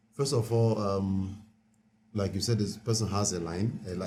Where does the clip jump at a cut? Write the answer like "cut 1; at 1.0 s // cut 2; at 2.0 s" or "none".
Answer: none